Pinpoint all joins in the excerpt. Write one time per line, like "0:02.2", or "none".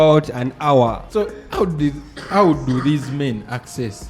0:01.1